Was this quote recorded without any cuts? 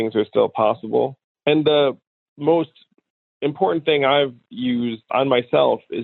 yes; 0 cuts

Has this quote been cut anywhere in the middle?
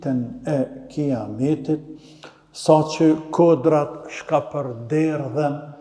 no; 0 cuts

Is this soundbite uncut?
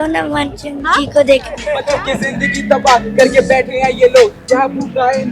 no; 1 cut; at 1.8 s

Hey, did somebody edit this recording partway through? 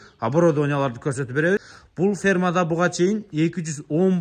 yes; 1 cut; at 1.8 s

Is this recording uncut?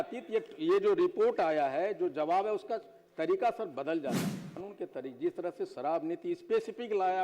no; 1 cut; at 4.6 s

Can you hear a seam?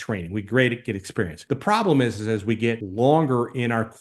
yes; 2 cuts; at 1.4 s, 2.8 s

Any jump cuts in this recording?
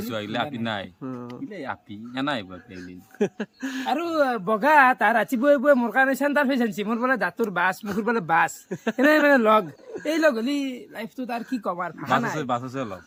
no; 0 cuts

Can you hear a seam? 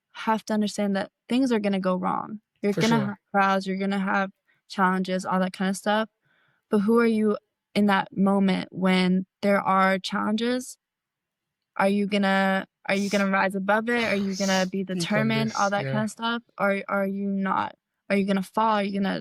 no; 0 cuts

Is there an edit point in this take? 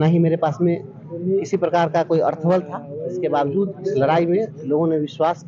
no; 0 cuts

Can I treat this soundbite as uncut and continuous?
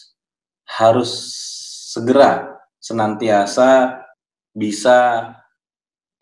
no; 1 cut; at 4.0 s

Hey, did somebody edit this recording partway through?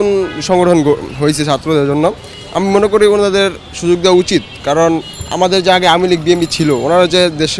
no; 0 cuts

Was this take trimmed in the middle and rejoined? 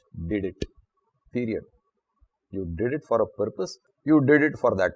yes; 1 cut; at 3.9 s

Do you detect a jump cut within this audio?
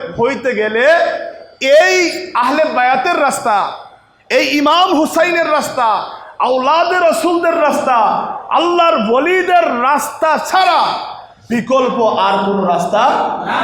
no; 0 cuts

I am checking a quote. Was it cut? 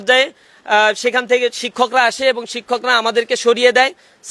no; 0 cuts

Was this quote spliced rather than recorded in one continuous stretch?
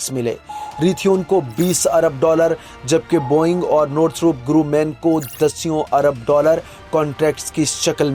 no; 0 cuts

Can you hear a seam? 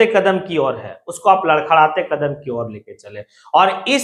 no; 0 cuts

